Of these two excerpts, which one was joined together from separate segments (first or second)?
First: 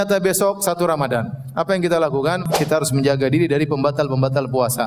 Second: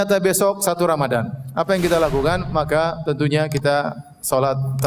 first